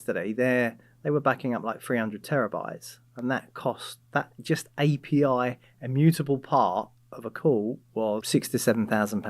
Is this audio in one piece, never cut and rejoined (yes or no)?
no